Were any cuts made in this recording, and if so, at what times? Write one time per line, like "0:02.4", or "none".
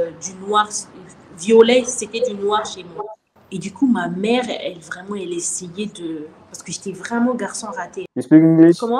0:03.4
0:08.0